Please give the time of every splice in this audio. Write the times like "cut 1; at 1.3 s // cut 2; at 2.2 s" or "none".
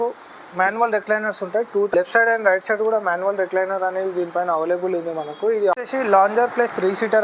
cut 1; at 1.9 s // cut 2; at 5.7 s